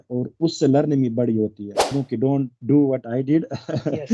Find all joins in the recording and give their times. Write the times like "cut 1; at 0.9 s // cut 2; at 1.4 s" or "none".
cut 1; at 1.9 s